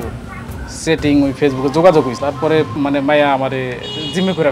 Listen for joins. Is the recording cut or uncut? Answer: cut